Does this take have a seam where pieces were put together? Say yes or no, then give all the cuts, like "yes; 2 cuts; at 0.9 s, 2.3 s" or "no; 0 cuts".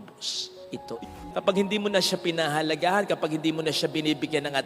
yes; 1 cut; at 1.1 s